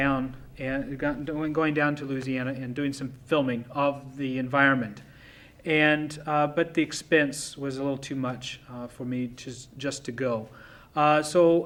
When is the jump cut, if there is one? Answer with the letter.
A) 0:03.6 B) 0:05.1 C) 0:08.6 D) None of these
D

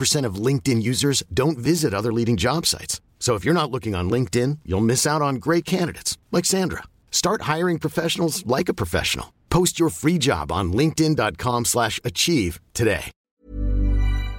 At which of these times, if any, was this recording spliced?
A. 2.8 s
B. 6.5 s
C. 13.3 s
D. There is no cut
C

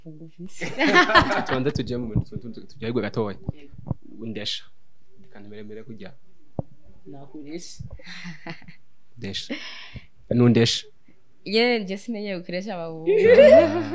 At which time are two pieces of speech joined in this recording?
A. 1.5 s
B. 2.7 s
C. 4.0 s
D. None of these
A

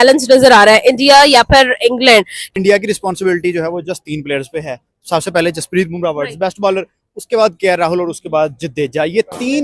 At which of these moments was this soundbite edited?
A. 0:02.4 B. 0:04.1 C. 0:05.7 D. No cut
A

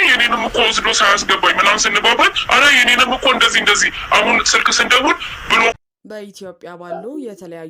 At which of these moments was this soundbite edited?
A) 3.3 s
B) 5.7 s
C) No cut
B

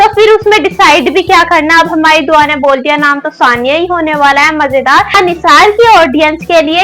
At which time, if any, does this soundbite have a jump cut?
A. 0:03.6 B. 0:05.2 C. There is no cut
B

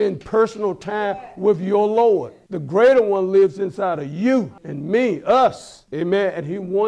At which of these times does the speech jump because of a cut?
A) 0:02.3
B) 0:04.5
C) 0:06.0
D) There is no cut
A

